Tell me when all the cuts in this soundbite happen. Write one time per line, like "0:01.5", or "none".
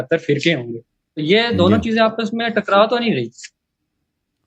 none